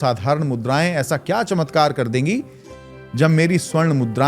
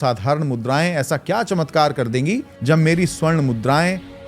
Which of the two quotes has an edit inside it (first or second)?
second